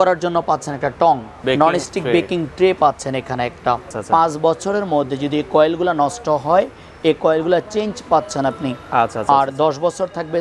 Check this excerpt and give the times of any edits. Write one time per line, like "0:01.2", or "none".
0:01.3
0:04.0